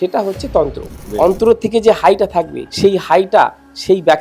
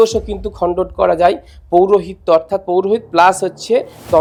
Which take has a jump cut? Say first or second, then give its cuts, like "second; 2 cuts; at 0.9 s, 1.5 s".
first; 2 cuts; at 1.0 s, 2.6 s